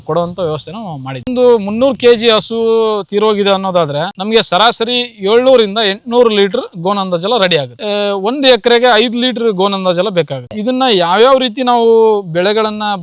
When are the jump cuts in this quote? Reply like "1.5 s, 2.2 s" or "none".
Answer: 1.3 s, 7.8 s, 10.4 s